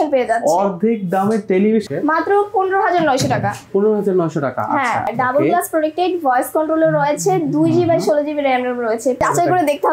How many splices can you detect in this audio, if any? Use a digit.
3